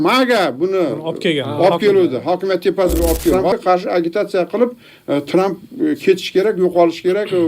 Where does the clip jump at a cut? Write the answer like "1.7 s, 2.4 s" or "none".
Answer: 3.4 s